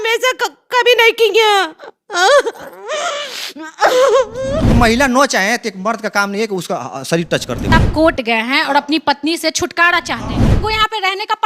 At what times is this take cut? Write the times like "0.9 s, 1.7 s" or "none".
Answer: 4.7 s, 7.7 s, 10.4 s